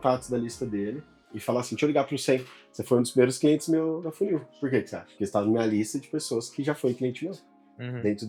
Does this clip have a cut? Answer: no; 0 cuts

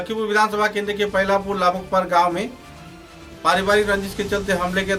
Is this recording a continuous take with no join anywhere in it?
yes; 0 cuts

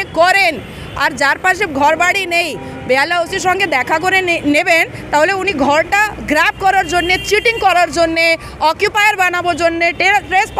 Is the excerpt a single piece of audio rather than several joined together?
yes; 0 cuts

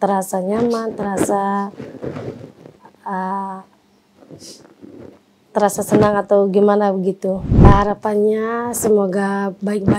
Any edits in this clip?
yes; 1 cut; at 7.6 s

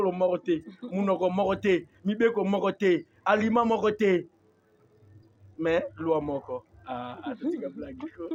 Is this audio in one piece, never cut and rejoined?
yes; 0 cuts

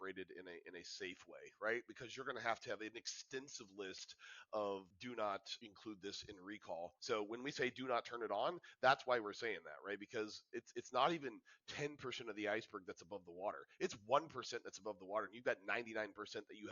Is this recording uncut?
no; 2 cuts; at 5.5 s, 7.0 s

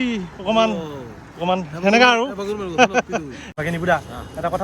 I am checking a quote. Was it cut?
yes; 1 cut; at 3.4 s

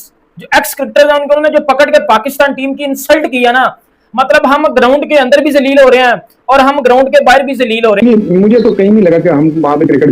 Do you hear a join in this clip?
yes; 1 cut; at 8.0 s

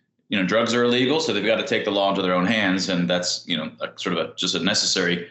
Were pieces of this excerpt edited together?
no; 0 cuts

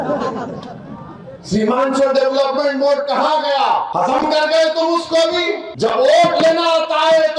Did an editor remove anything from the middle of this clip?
yes; 2 cuts; at 3.9 s, 5.7 s

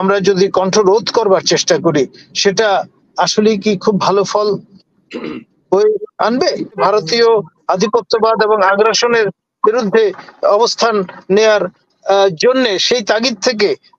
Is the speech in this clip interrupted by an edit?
yes; 1 cut; at 6.8 s

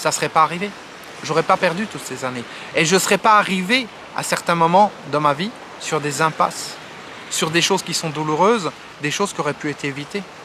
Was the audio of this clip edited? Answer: no; 0 cuts

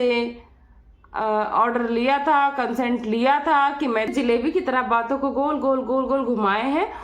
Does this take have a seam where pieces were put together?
yes; 1 cut; at 4.1 s

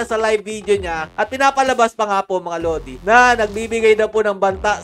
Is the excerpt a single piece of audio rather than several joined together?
no; 1 cut; at 1.1 s

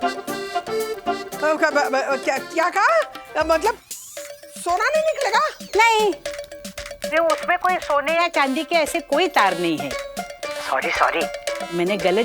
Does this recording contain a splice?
yes; 2 cuts; at 1.3 s, 6.3 s

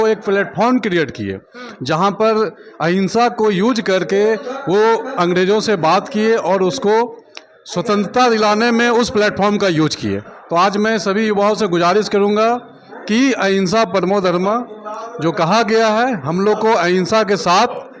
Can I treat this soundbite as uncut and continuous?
yes; 0 cuts

